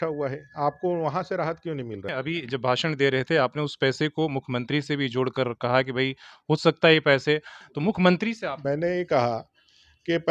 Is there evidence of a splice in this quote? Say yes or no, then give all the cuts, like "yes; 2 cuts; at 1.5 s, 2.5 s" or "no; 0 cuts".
yes; 3 cuts; at 2.1 s, 7.6 s, 8.6 s